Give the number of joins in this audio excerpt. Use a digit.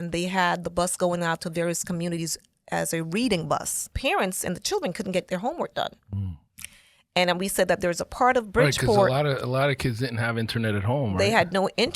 1